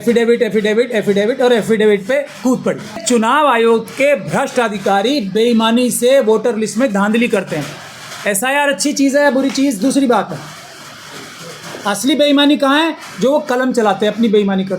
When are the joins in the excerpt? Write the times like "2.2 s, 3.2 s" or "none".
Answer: 3.0 s